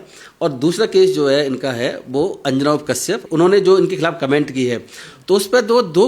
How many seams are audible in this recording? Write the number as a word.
one